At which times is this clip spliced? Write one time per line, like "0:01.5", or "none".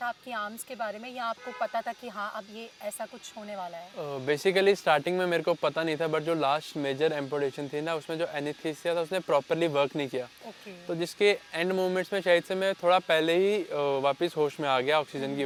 none